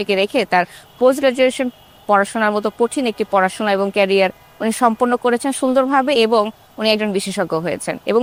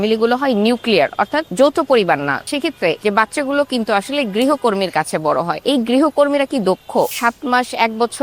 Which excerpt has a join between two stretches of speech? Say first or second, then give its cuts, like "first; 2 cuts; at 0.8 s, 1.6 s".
second; 4 cuts; at 1.4 s, 2.6 s, 5.5 s, 7.1 s